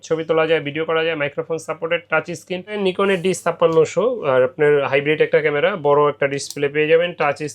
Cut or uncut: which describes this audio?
cut